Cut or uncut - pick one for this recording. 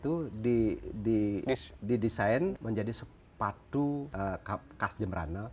cut